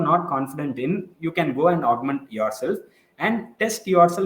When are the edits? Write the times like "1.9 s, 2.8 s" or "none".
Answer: none

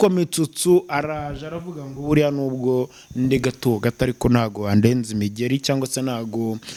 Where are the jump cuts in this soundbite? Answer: none

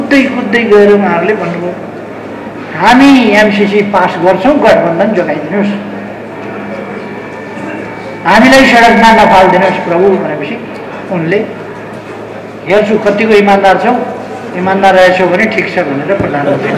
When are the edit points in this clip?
none

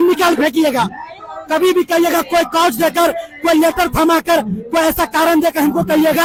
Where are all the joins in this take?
none

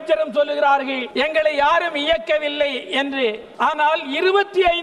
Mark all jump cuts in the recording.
1.0 s, 3.5 s

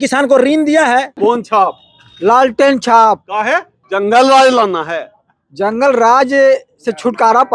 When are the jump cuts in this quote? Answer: 1.1 s, 3.8 s

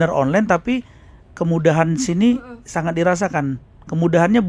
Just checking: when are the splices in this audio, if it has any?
none

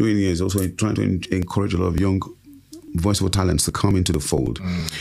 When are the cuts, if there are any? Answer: none

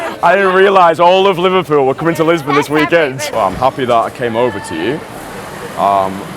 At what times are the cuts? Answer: 3.3 s

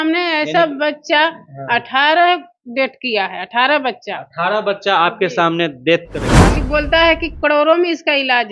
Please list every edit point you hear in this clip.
6.6 s

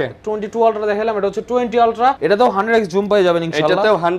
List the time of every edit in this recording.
2.2 s

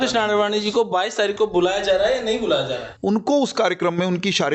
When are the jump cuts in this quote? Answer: 2.9 s

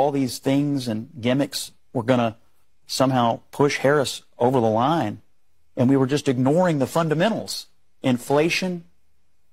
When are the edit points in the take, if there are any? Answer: none

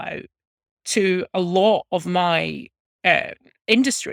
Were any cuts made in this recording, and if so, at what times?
none

